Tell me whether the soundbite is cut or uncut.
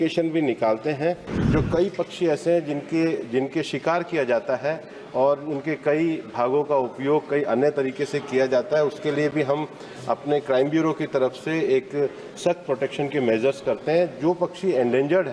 cut